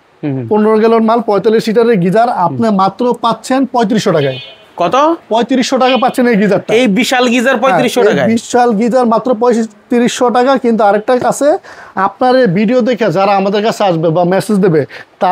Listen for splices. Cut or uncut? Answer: uncut